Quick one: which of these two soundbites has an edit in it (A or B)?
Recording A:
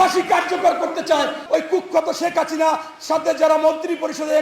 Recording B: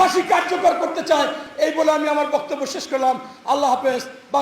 A